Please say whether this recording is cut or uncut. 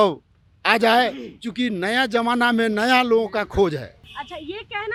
uncut